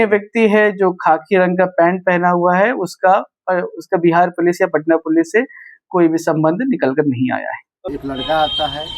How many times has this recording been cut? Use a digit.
1